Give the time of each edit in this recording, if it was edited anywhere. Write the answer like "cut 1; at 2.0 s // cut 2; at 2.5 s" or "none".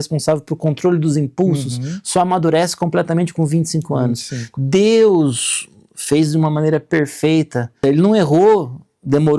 cut 1; at 7.8 s